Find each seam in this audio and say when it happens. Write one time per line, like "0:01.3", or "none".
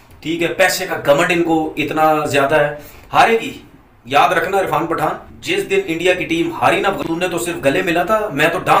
none